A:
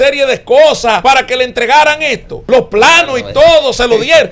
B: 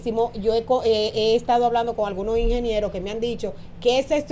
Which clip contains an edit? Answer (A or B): A